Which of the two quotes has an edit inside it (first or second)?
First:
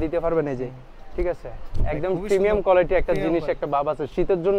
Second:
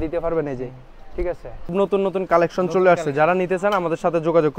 second